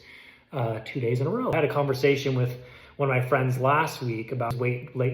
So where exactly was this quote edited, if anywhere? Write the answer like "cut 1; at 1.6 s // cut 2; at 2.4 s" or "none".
cut 1; at 1.5 s